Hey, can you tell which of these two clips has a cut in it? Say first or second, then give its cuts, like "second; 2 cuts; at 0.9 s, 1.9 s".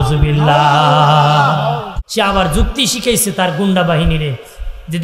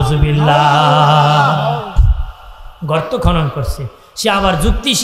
first; 1 cut; at 2.0 s